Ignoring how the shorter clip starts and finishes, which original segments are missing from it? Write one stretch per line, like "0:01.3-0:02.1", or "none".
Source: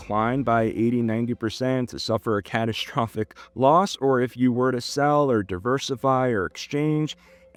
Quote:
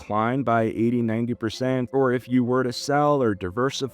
0:01.9-0:04.0